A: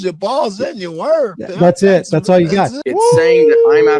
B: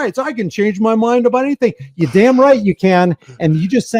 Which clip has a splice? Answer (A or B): A